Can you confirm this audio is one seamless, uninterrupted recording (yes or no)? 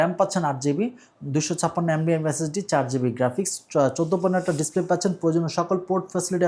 yes